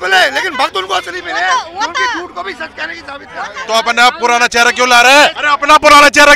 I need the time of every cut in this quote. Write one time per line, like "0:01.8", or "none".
0:03.6
0:05.4